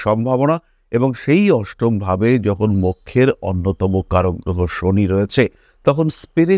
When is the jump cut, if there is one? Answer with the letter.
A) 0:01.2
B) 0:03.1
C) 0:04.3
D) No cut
D